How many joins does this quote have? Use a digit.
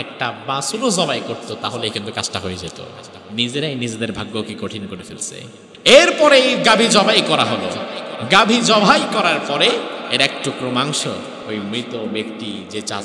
4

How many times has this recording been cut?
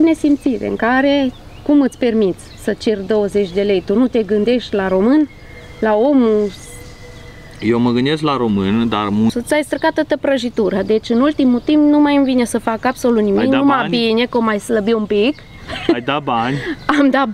1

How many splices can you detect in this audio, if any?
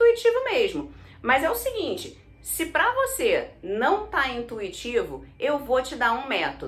0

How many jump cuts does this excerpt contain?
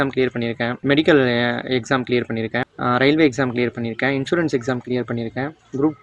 0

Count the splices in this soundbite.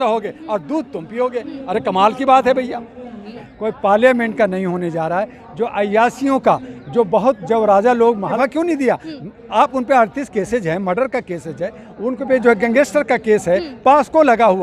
3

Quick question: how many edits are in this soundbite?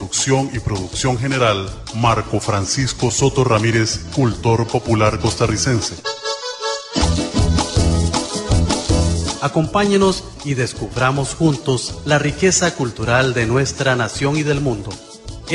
2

